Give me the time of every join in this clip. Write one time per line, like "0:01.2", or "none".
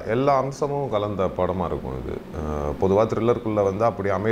none